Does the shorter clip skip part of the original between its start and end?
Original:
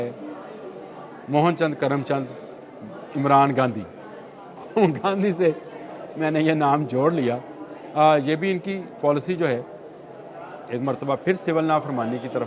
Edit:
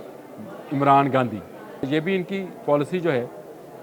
yes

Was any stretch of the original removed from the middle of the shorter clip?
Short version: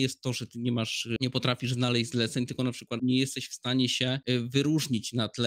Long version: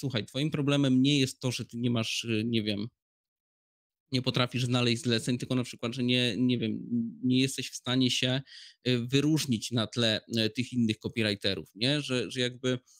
yes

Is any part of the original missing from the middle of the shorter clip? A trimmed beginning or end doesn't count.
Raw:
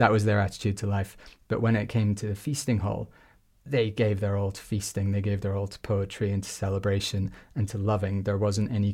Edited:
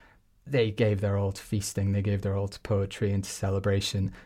no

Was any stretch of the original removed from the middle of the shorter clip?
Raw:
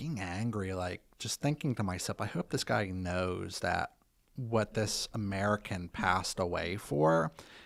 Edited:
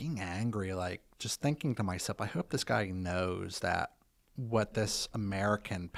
no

